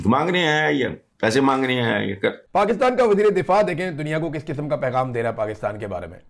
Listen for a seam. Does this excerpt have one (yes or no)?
yes